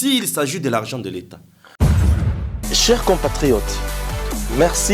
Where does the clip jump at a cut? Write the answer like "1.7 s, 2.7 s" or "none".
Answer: 2.0 s